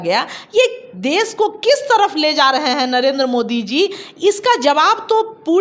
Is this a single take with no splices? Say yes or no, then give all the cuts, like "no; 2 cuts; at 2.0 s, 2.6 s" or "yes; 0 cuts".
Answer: yes; 0 cuts